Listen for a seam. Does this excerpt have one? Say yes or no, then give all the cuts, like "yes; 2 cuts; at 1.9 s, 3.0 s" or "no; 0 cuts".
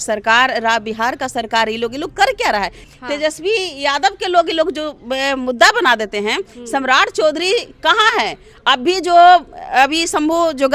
yes; 1 cut; at 2.9 s